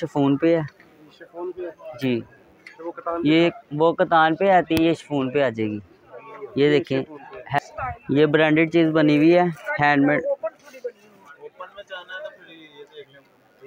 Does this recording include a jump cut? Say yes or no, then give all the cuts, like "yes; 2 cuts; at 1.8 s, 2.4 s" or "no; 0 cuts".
yes; 1 cut; at 7.6 s